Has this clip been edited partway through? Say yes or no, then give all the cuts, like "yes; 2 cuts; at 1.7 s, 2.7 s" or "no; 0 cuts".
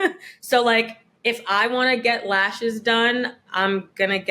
yes; 1 cut; at 1.0 s